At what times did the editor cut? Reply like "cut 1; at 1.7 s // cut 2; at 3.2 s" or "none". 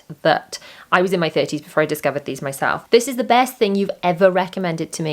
cut 1; at 2.8 s